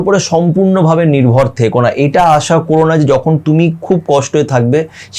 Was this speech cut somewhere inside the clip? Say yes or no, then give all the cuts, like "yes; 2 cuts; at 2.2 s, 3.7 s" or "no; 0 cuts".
no; 0 cuts